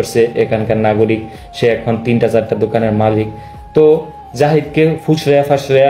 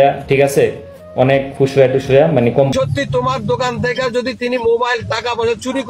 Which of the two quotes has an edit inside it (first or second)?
second